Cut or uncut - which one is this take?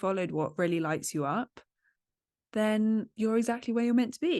cut